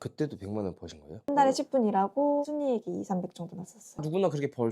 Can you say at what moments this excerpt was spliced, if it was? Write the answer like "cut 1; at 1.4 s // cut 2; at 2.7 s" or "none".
cut 1; at 1.3 s // cut 2; at 2.4 s // cut 3; at 3.8 s